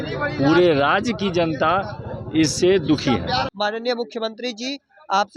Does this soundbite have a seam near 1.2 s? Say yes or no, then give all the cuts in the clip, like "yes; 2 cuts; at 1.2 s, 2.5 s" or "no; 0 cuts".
no; 1 cut; at 3.5 s